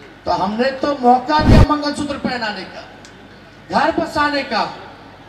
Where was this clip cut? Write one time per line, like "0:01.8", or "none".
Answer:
none